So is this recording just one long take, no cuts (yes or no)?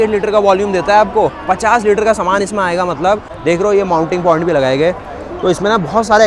no